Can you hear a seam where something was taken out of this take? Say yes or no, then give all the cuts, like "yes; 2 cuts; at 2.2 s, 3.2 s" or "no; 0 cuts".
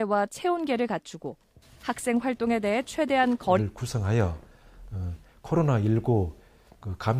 yes; 1 cut; at 3.6 s